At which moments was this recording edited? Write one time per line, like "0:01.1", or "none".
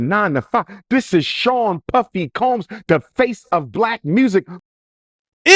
0:04.6